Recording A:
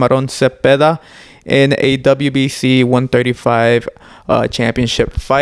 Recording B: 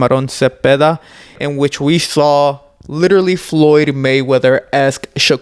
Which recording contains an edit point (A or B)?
B